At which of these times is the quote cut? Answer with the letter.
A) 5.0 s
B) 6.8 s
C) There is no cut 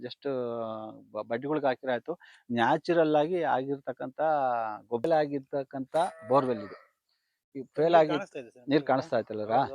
A